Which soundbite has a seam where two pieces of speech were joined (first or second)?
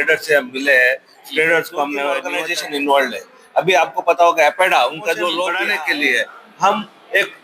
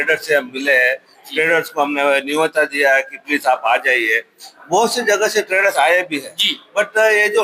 first